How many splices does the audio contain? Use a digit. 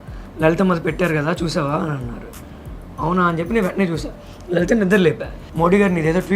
1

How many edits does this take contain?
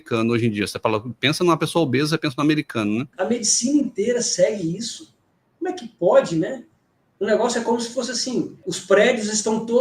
2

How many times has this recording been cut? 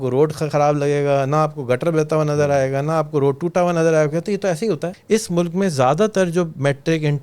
1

